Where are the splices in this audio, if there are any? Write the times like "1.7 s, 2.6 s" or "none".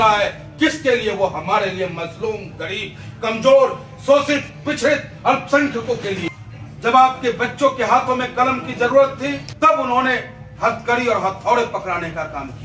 6.4 s, 9.5 s